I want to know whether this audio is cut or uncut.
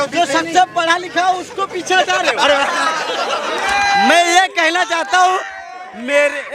uncut